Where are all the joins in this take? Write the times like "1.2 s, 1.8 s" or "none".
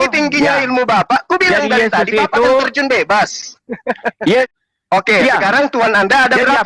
4.5 s